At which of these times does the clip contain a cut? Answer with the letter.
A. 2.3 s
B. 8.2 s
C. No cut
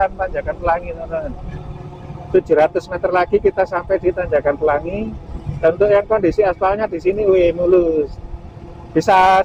C